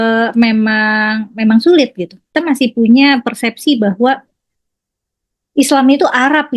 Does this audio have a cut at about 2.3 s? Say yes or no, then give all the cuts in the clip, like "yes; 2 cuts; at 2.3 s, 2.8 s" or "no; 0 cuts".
yes; 1 cut; at 2.3 s